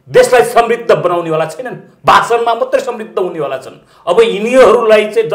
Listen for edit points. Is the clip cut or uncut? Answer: uncut